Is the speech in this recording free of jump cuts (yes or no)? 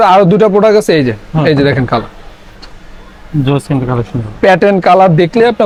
yes